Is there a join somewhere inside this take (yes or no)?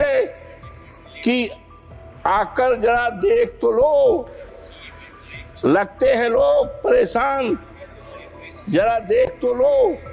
no